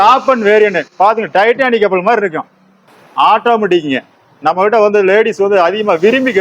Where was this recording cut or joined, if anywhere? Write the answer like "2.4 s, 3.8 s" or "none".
2.8 s